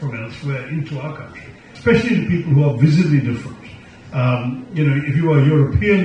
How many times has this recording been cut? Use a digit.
1